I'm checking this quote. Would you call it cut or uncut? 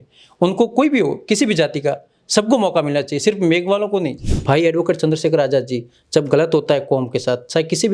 cut